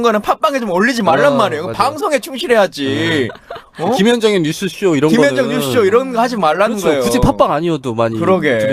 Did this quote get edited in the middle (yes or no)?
yes